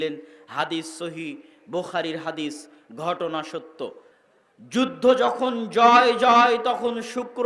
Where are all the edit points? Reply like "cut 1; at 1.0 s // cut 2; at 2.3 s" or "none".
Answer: cut 1; at 4.1 s